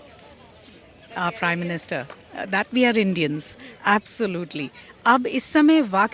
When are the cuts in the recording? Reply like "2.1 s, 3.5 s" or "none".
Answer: none